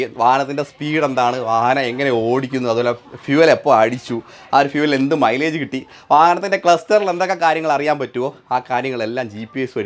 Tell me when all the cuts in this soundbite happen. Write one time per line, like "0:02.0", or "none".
none